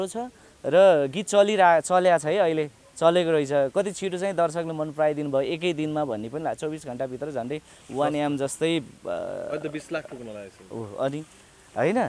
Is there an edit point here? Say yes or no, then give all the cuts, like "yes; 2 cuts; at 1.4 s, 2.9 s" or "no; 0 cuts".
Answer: no; 0 cuts